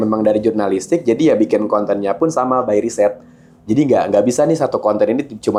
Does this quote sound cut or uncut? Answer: uncut